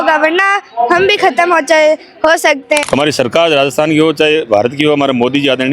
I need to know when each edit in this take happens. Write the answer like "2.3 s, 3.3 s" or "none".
2.8 s